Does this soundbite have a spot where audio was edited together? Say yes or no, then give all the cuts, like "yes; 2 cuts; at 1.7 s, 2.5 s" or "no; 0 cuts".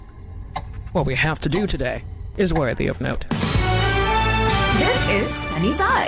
no; 0 cuts